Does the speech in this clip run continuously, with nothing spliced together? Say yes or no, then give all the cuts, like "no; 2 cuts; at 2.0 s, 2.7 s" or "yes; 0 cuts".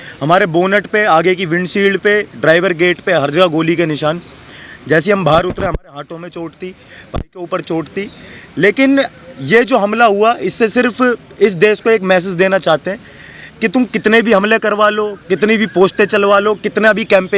yes; 0 cuts